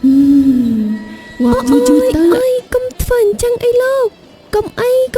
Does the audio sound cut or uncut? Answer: cut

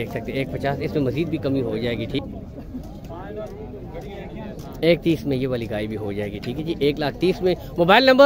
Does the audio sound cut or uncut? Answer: cut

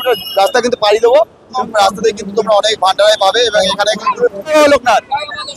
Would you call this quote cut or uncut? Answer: cut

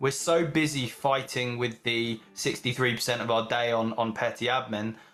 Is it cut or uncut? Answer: uncut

